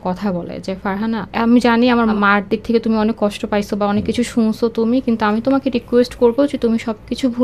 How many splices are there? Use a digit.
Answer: 2